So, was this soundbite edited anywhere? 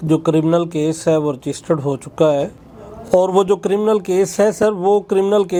no; 0 cuts

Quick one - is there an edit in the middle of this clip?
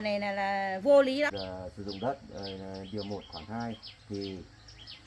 yes; 1 cut; at 1.3 s

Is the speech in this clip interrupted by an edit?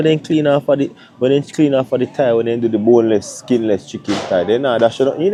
no; 0 cuts

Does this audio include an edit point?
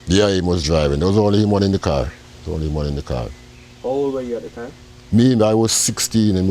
no; 0 cuts

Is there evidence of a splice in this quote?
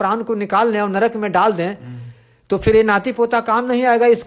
no; 0 cuts

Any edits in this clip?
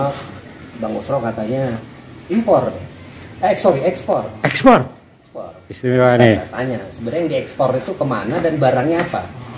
no; 0 cuts

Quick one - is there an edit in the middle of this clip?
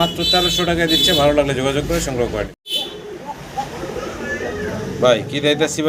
no; 0 cuts

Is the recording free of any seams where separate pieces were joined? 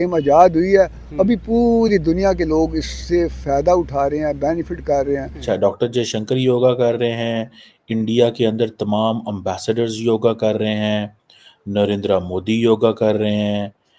no; 1 cut; at 5.4 s

